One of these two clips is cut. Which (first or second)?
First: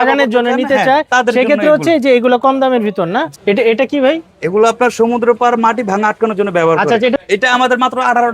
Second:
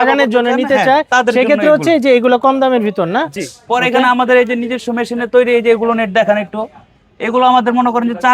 first